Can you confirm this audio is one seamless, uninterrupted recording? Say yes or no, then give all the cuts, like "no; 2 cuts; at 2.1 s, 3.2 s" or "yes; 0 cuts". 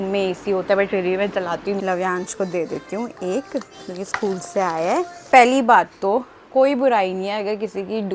no; 2 cuts; at 1.8 s, 5.2 s